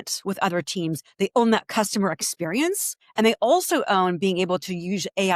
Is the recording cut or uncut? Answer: cut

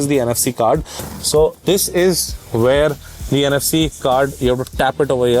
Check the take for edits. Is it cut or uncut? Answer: cut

